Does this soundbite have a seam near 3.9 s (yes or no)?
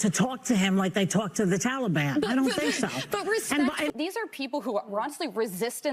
yes